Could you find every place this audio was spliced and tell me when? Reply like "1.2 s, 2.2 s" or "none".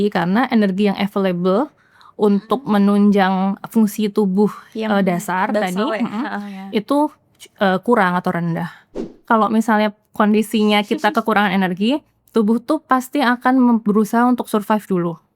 9.0 s